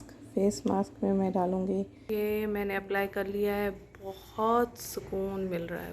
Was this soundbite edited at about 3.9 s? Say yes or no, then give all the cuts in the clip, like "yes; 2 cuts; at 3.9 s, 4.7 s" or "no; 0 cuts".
no; 1 cut; at 2.0 s